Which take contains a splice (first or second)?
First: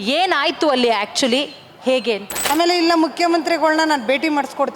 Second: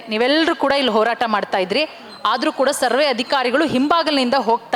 first